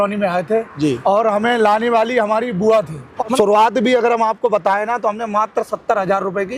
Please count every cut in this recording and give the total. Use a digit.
1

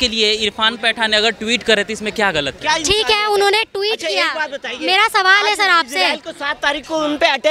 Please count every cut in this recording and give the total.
0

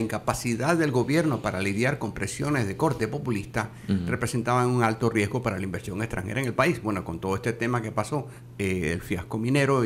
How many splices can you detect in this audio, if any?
1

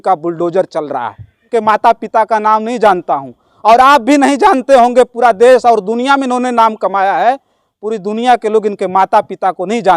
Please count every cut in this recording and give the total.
1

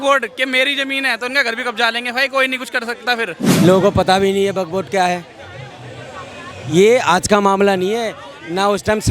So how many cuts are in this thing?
1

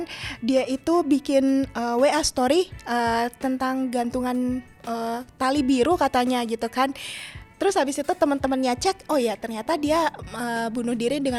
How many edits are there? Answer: 0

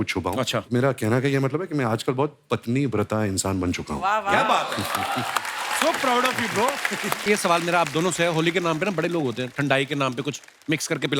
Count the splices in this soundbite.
1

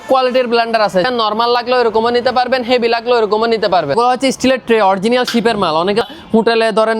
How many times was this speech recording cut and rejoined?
3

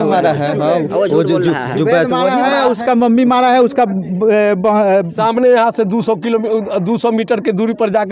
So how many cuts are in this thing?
1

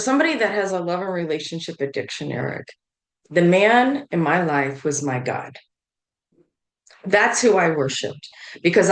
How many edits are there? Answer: 0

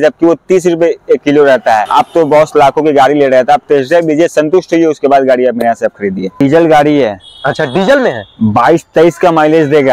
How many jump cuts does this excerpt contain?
2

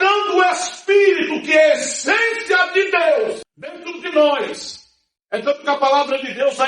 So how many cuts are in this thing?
1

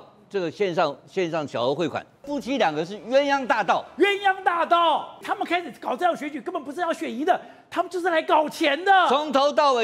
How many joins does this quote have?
2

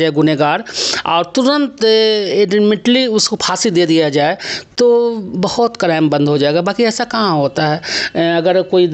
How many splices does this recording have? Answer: 0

